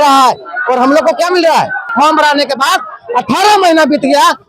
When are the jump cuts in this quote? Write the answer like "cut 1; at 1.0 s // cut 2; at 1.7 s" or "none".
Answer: cut 1; at 1.9 s